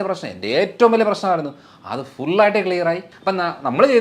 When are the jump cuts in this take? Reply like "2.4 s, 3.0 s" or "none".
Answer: 3.1 s